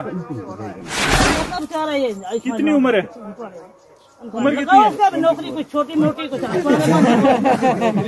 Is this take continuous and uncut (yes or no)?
yes